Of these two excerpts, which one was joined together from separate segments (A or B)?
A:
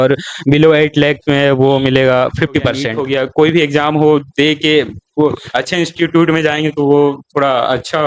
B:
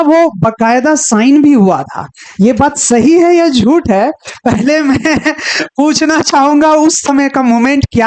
A